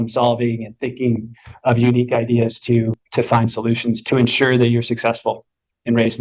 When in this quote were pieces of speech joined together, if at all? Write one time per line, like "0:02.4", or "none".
0:04.0